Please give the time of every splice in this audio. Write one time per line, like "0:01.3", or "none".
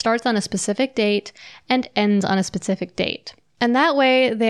none